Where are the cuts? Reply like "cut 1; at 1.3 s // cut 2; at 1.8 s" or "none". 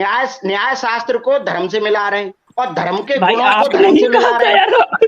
cut 1; at 2.4 s

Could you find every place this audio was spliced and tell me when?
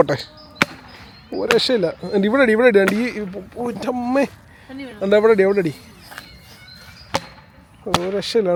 none

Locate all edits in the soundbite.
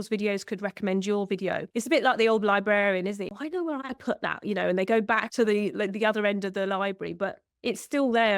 cut 1; at 1.7 s // cut 2; at 3.3 s

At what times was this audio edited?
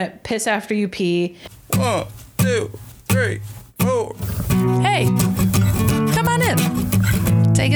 cut 1; at 1.5 s

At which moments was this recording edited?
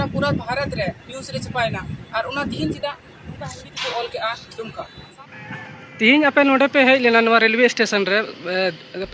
none

